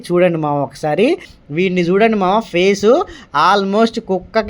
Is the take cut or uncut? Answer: cut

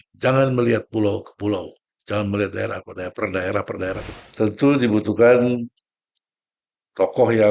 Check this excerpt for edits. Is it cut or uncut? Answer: cut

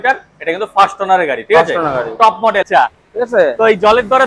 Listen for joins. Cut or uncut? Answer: cut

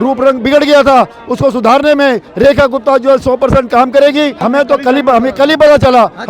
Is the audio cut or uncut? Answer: cut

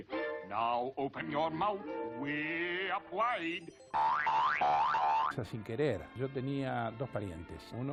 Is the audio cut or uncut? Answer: uncut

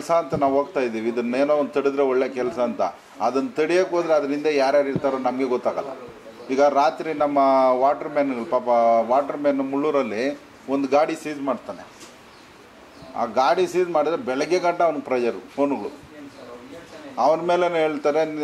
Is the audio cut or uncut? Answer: uncut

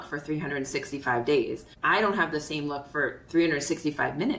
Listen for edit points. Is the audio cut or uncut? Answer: cut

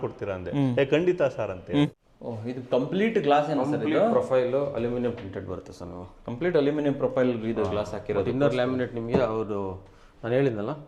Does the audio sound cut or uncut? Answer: cut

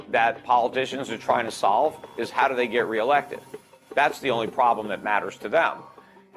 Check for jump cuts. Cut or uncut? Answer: uncut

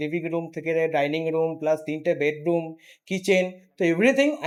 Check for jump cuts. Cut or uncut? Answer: uncut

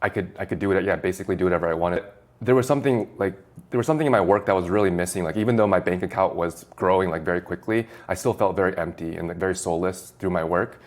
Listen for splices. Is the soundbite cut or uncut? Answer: cut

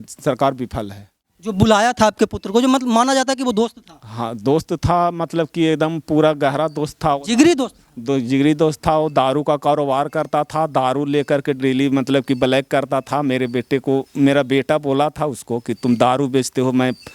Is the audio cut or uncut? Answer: cut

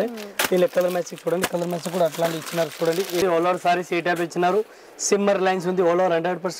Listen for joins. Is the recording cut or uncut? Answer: cut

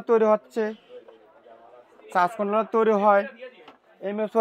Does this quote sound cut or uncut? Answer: uncut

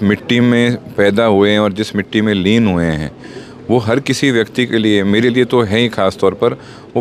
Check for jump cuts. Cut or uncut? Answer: uncut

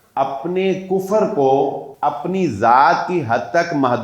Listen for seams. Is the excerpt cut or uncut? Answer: cut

